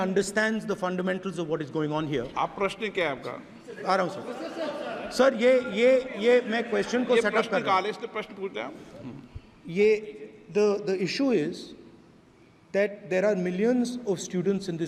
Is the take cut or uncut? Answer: uncut